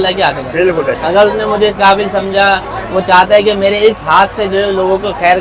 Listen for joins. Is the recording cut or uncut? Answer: uncut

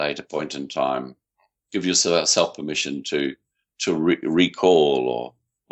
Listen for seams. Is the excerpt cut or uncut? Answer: uncut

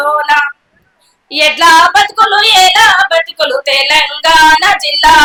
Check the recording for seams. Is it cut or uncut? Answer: uncut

